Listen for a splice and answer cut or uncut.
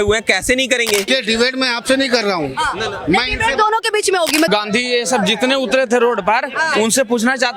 cut